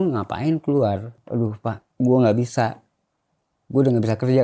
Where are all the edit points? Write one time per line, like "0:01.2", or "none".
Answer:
0:01.2